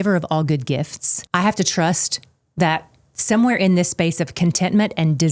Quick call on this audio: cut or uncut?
cut